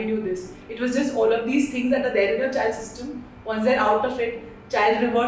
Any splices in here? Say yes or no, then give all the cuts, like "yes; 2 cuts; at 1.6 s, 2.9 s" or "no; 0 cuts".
no; 0 cuts